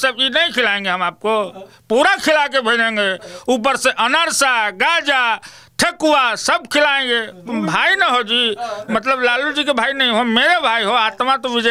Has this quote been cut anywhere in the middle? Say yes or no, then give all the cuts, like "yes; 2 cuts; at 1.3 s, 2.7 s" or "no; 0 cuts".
no; 0 cuts